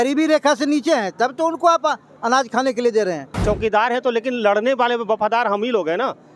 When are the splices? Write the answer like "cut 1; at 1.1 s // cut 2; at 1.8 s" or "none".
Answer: cut 1; at 3.3 s